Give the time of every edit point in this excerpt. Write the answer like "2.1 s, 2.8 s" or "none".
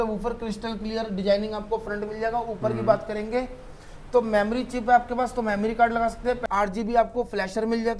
6.4 s